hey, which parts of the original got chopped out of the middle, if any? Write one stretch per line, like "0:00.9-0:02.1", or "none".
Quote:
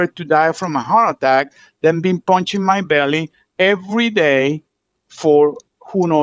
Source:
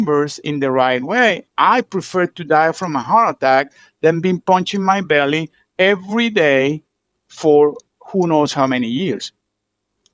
none